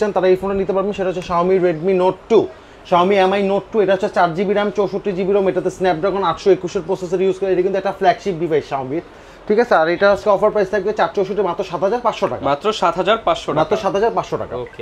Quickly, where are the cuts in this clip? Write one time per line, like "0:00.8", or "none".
none